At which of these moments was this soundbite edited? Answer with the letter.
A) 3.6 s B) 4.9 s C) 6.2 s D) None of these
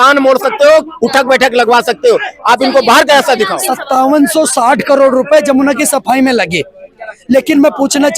A